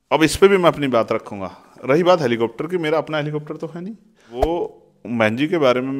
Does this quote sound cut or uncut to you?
cut